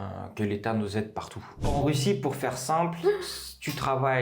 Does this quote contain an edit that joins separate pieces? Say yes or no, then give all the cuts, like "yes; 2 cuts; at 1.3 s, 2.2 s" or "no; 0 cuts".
yes; 1 cut; at 1.7 s